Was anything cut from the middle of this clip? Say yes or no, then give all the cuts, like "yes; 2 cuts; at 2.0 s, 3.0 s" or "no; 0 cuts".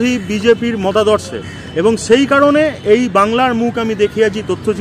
no; 0 cuts